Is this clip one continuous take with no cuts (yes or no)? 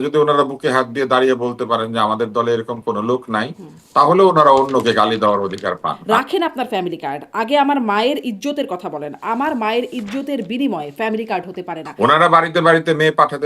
no